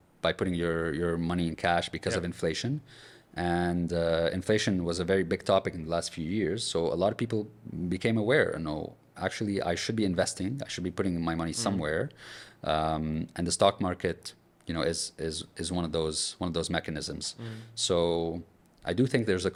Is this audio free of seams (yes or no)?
yes